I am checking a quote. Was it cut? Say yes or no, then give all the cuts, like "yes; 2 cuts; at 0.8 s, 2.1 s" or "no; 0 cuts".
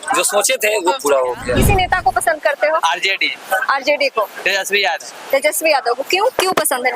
yes; 1 cut; at 1.6 s